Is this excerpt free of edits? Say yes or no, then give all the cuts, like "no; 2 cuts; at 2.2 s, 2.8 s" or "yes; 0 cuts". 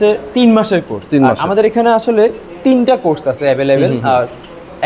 yes; 0 cuts